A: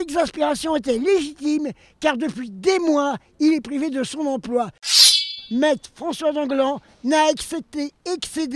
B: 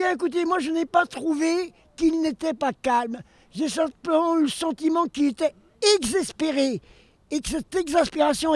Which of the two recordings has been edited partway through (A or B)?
A